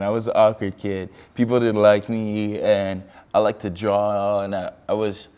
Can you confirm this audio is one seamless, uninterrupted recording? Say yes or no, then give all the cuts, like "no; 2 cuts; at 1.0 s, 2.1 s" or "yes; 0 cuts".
yes; 0 cuts